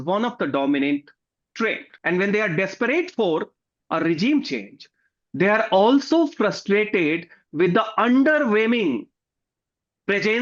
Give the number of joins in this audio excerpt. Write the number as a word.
one